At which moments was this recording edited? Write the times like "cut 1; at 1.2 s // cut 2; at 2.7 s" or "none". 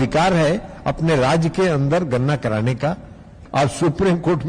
cut 1; at 3.3 s